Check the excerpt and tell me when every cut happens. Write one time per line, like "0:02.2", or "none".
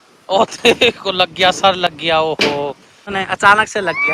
0:03.1